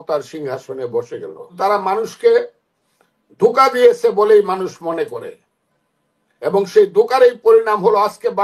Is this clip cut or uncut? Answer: cut